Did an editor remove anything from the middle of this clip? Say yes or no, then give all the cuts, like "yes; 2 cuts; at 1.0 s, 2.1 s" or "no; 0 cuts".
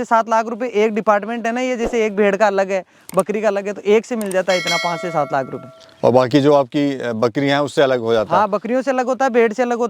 no; 0 cuts